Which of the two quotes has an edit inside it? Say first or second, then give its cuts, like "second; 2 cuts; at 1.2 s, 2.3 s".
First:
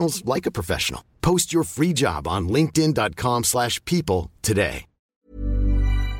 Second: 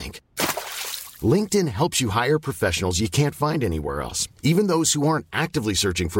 first; 1 cut; at 5.3 s